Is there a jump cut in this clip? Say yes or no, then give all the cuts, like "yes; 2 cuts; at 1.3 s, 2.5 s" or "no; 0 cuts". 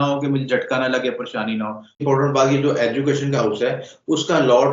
yes; 1 cut; at 2.0 s